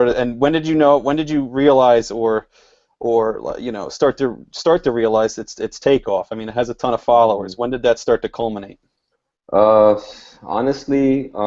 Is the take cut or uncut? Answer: uncut